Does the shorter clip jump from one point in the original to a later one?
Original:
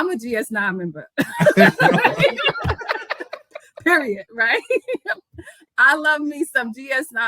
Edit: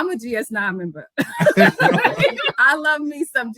yes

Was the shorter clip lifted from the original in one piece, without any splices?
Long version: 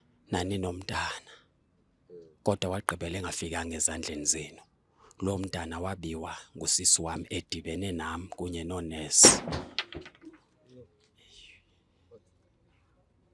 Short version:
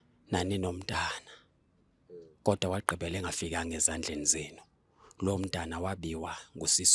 yes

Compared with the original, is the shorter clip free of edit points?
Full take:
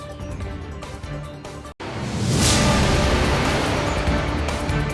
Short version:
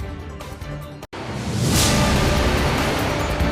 no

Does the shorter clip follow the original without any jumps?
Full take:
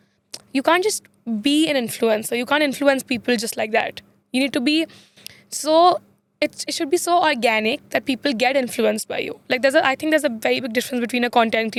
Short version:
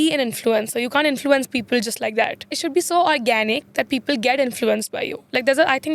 no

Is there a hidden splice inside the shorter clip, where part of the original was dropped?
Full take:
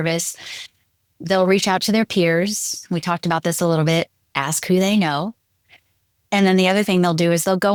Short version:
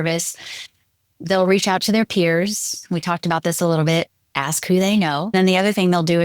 yes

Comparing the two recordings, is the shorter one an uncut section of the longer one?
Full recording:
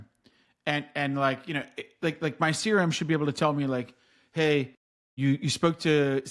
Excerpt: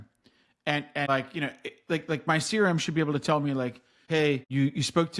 no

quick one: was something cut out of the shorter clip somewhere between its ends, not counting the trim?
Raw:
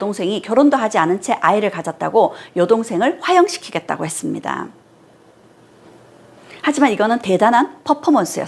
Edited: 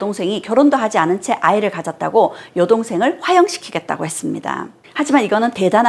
yes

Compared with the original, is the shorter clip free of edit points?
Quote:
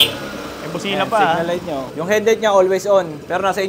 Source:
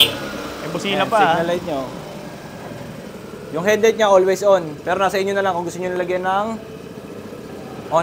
no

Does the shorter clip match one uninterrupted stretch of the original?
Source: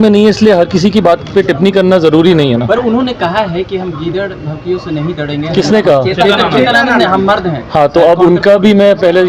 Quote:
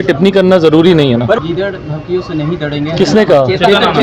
no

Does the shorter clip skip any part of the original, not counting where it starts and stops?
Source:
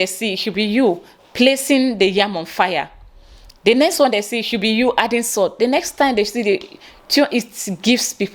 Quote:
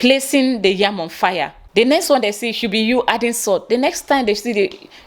yes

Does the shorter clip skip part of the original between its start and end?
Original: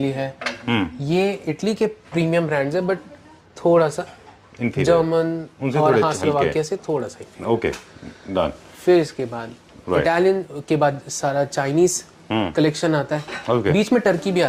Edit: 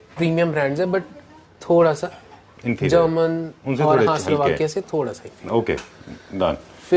no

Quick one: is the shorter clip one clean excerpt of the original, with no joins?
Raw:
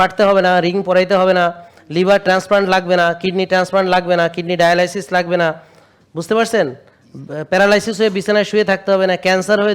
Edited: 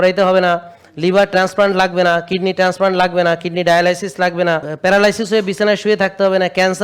no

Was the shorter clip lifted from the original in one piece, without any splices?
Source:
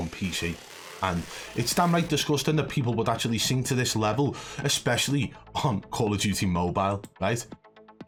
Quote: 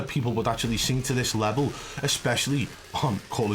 yes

